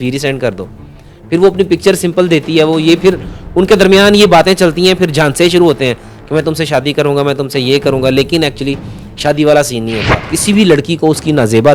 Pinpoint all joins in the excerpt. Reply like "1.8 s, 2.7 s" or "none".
10.3 s